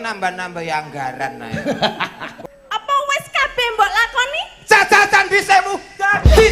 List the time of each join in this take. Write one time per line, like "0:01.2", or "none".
0:02.3